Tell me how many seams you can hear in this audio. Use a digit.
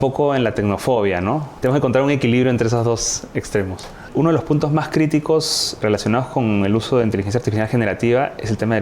3